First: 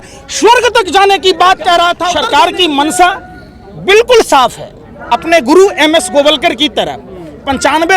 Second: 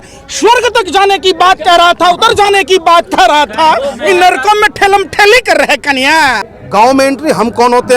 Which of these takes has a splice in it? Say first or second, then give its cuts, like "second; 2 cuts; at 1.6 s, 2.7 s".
first; 1 cut; at 2.1 s